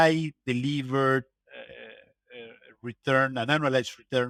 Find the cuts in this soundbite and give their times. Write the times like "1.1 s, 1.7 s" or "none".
none